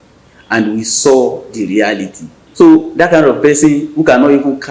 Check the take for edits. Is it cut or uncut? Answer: cut